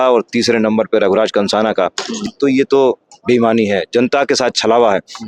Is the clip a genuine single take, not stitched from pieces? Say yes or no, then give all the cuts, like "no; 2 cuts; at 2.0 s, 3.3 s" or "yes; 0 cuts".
no; 1 cut; at 2.1 s